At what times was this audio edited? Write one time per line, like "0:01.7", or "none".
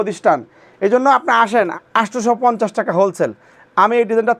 0:01.7